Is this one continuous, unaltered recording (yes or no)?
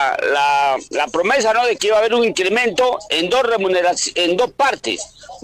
yes